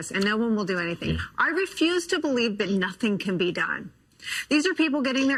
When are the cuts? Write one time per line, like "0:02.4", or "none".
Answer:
none